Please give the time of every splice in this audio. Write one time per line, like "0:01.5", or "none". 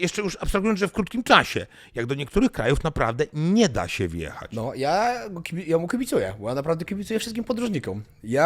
none